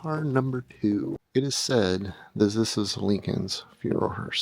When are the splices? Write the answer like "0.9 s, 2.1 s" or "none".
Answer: 1.2 s